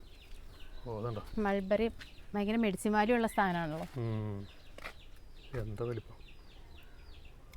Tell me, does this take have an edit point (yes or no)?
no